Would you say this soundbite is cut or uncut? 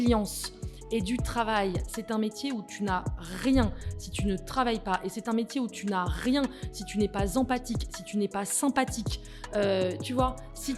uncut